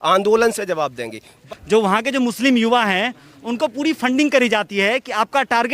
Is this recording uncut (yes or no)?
no